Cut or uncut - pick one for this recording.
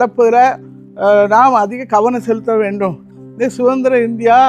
cut